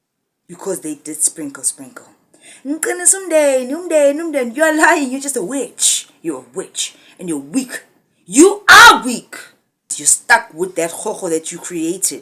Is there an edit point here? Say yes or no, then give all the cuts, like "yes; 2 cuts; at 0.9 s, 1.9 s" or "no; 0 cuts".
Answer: yes; 1 cut; at 10.1 s